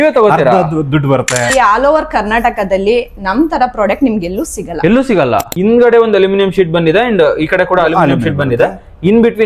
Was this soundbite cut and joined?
yes; 2 cuts; at 1.5 s, 5.5 s

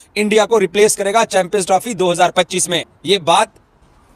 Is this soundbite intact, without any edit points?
yes; 0 cuts

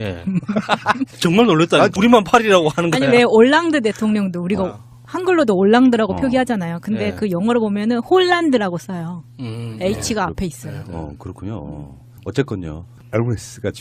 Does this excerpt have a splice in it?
no; 0 cuts

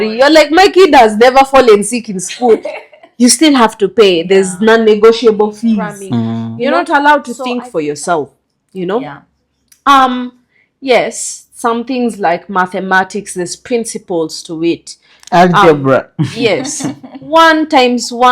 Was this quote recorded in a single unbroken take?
no; 1 cut; at 6.6 s

